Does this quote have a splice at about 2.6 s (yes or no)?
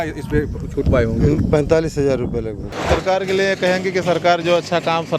yes